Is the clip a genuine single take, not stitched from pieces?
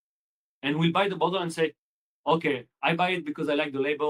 yes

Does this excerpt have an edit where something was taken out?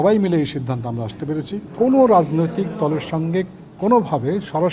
yes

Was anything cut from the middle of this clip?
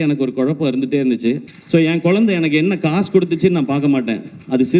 yes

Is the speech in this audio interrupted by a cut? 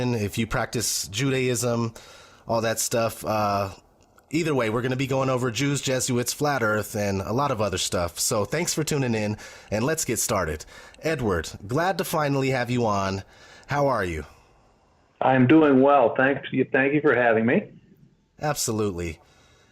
yes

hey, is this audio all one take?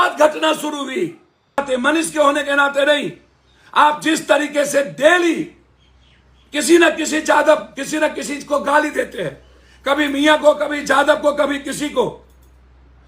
no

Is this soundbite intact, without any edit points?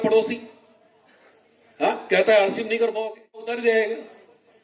yes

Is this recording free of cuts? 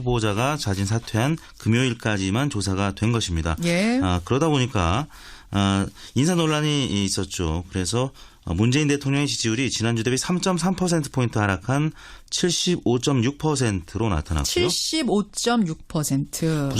no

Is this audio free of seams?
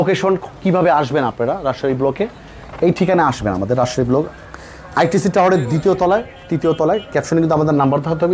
yes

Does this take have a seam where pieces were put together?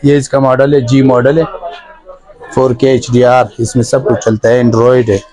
no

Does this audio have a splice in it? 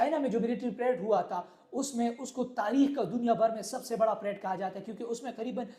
no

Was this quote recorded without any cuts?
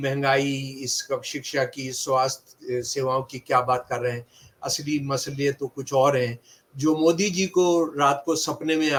yes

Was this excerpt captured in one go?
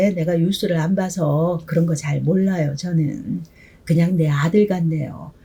yes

